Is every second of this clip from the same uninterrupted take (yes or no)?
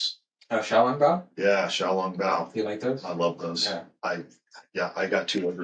yes